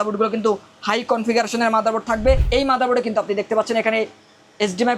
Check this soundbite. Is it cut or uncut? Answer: cut